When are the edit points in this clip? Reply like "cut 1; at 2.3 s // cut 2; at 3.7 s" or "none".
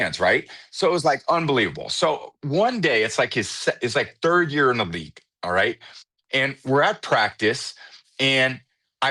none